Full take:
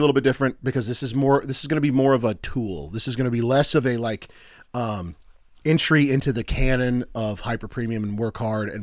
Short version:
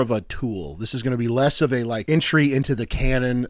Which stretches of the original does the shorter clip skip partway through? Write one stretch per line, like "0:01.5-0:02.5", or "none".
0:04.2-0:05.6